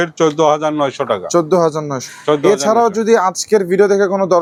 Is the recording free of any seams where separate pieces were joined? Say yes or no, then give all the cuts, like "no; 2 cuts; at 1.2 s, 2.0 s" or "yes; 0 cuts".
yes; 0 cuts